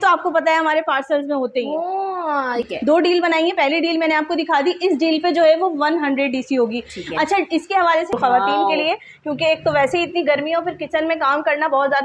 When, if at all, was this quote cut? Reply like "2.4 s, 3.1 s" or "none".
2.6 s, 8.1 s